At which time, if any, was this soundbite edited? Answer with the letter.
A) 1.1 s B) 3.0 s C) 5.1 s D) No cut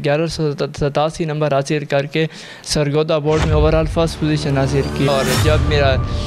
C